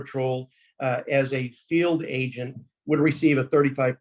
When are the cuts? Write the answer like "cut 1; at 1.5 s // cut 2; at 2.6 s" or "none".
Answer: none

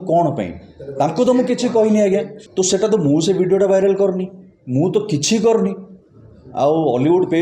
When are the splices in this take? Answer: cut 1; at 2.4 s

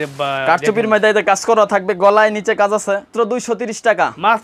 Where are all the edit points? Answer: cut 1; at 3.1 s

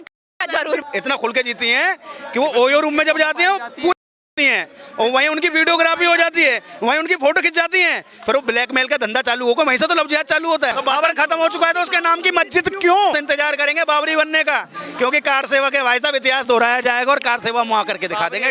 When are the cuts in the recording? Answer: cut 1; at 0.9 s // cut 2; at 10.8 s // cut 3; at 13.2 s

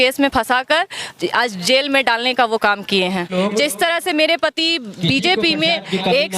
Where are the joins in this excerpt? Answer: cut 1; at 3.3 s

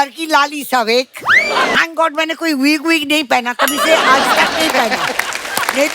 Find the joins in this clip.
cut 1; at 1.7 s

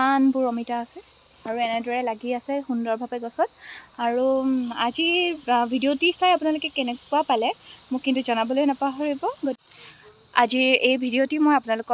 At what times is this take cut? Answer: none

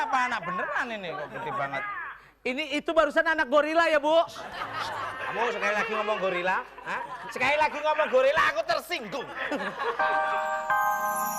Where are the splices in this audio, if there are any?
cut 1; at 10.1 s

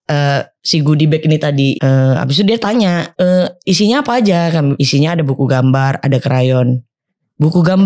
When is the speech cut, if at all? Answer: cut 1; at 1.7 s // cut 2; at 3.1 s // cut 3; at 4.8 s

